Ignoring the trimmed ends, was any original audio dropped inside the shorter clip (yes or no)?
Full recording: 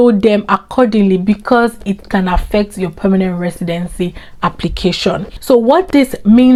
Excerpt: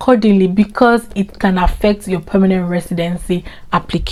no